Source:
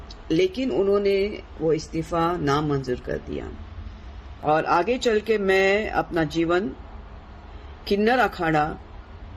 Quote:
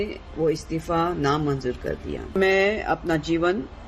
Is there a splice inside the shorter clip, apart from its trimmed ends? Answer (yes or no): yes